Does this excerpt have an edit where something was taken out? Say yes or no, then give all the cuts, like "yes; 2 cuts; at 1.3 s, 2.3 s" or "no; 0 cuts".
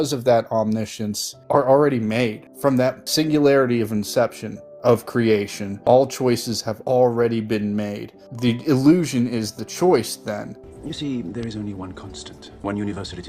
no; 0 cuts